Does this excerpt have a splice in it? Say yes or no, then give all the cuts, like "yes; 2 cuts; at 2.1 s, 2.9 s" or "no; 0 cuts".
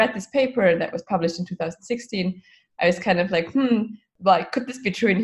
yes; 1 cut; at 4.0 s